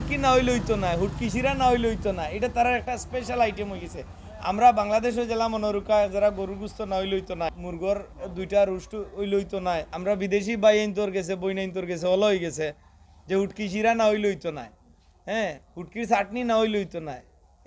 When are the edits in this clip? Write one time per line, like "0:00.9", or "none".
0:07.6
0:09.9